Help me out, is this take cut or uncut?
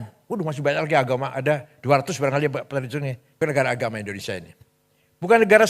cut